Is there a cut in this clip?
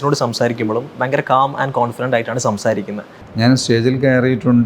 yes; 1 cut; at 3.1 s

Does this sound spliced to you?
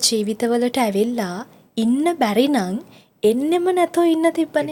no; 0 cuts

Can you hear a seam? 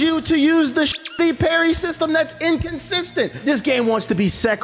yes; 1 cut; at 3.4 s

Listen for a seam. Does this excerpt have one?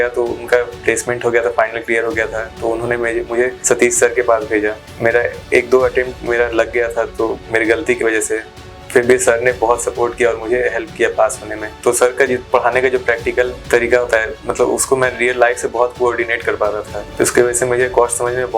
yes; 5 cuts; at 3.6 s, 4.9 s, 11.7 s, 13.6 s, 17.0 s

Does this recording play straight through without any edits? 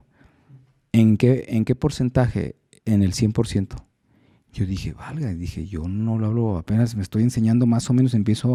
yes; 0 cuts

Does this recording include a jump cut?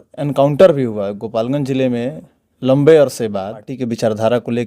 yes; 1 cut; at 3.7 s

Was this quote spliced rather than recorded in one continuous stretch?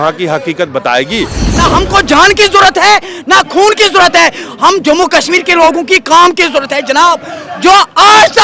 yes; 1 cut; at 1.5 s

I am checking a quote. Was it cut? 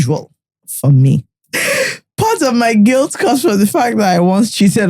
yes; 1 cut; at 1.4 s

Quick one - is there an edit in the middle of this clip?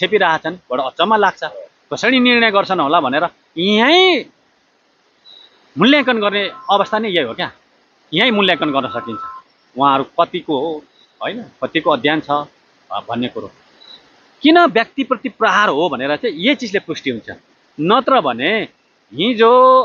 no; 0 cuts

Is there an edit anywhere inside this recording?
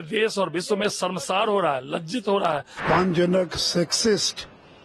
yes; 1 cut; at 2.7 s

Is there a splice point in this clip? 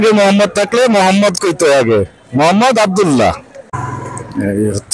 yes; 1 cut; at 3.7 s

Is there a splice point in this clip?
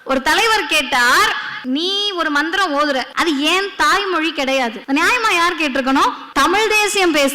yes; 4 cuts; at 1.5 s, 3.1 s, 4.8 s, 6.2 s

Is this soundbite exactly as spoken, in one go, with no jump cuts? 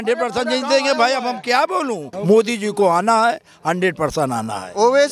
no; 1 cut; at 2.1 s

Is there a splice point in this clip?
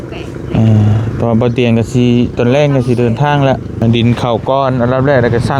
yes; 1 cut; at 3.8 s

